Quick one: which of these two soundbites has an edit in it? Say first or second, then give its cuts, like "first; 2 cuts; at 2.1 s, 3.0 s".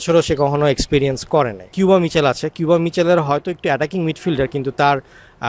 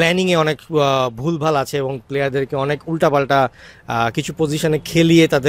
first; 1 cut; at 1.7 s